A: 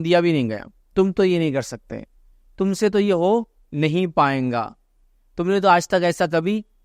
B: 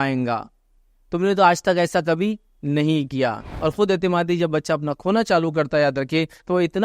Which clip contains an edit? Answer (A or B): B